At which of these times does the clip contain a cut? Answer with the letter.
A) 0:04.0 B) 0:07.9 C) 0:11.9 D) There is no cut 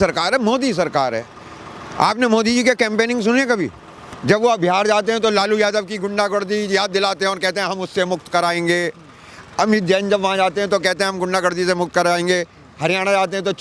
D